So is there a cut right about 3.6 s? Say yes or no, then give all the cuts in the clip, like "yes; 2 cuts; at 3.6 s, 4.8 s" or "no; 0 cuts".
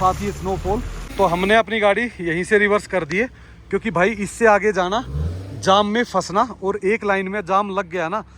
no; 1 cut; at 0.9 s